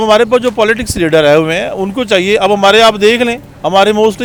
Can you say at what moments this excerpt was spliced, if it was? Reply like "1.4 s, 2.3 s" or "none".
none